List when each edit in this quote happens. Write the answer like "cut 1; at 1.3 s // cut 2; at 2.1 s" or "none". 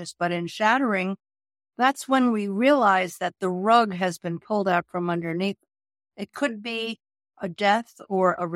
cut 1; at 7.2 s